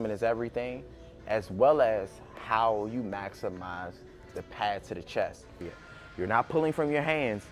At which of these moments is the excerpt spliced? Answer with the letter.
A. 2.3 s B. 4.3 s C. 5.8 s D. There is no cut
C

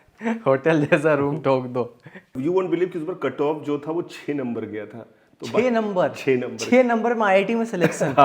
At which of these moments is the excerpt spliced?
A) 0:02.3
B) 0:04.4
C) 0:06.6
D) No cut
A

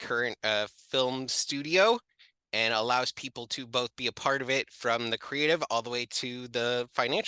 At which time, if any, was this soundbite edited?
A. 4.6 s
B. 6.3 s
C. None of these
C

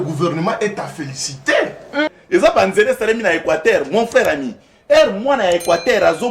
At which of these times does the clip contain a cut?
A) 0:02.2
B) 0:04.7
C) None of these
A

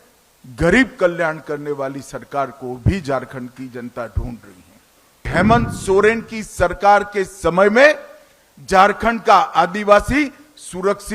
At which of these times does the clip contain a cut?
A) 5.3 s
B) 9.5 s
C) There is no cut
A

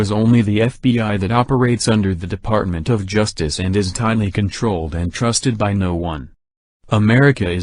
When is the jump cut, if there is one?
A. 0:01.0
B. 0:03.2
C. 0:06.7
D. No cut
C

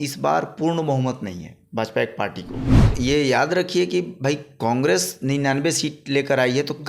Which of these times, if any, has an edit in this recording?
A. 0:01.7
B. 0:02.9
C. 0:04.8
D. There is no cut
B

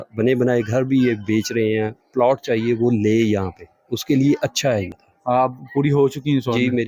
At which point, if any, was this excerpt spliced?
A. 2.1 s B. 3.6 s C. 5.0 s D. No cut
C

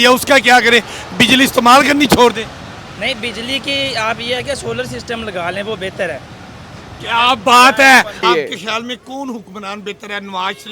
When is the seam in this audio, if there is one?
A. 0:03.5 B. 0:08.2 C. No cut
B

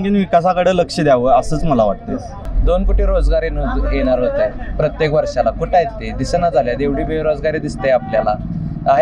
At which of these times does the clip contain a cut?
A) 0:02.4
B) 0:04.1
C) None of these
A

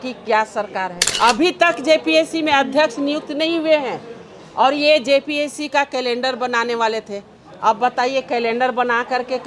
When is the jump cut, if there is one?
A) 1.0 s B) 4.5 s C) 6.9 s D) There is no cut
A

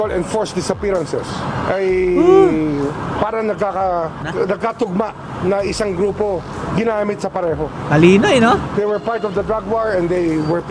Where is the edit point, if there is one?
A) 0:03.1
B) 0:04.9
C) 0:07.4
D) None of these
D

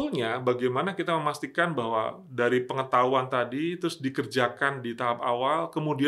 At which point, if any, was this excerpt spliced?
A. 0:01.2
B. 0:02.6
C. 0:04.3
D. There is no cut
D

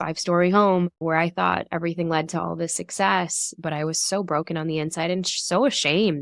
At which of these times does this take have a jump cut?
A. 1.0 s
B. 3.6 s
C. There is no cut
A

